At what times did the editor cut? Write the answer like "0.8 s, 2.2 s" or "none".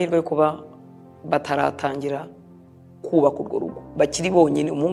none